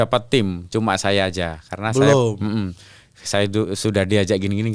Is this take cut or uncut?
uncut